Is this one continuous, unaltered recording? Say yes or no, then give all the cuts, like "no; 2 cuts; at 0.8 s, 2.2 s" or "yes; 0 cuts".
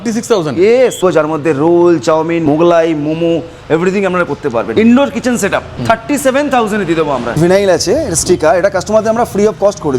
no; 5 cuts; at 1.0 s, 2.4 s, 4.7 s, 5.7 s, 7.4 s